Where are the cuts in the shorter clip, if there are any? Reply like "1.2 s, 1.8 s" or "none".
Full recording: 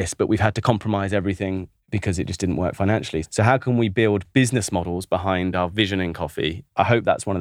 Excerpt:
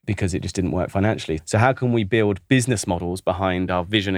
none